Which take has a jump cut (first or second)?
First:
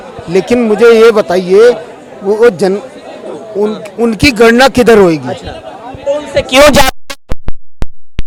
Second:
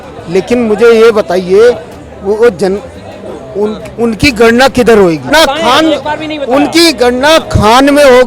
second